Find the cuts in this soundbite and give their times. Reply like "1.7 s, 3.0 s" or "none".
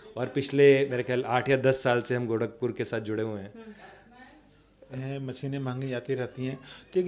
4.9 s